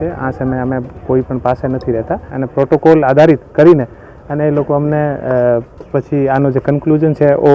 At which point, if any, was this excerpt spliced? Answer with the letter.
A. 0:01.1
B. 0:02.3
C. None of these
B